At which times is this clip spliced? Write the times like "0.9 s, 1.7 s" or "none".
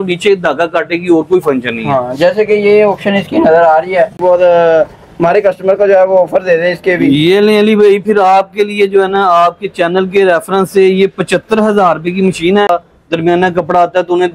4.2 s, 12.7 s

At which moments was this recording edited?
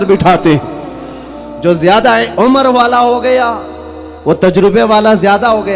2.3 s

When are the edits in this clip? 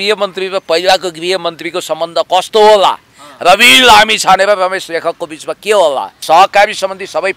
6.2 s

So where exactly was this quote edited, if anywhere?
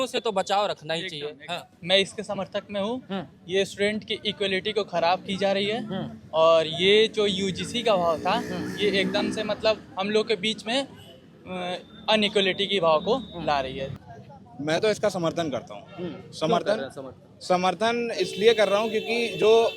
13.9 s

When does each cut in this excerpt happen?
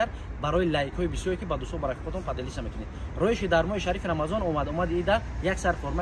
none

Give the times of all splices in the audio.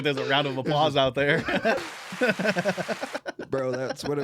1.8 s

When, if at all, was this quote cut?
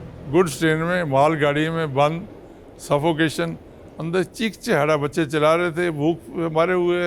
none

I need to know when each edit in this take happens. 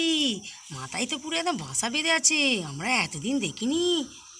none

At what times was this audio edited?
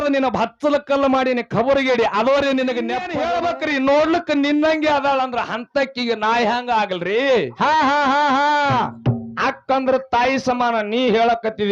3.0 s

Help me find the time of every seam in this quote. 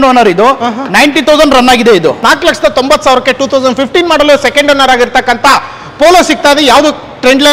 2.2 s

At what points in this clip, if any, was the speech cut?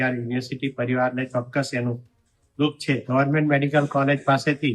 3.0 s

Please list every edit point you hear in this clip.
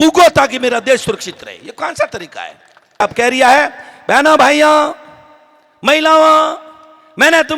3.0 s

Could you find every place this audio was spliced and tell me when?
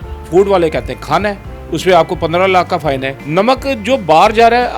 3.1 s

